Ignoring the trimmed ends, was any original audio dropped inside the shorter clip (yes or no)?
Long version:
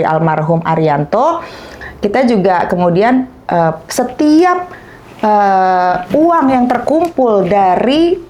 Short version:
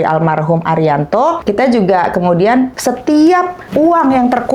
yes